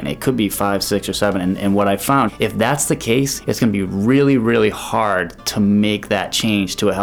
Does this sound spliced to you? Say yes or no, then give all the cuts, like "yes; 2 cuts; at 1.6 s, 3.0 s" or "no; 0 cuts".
yes; 2 cuts; at 2.3 s, 3.4 s